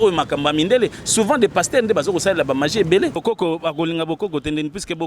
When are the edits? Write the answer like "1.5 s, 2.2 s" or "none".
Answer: 3.2 s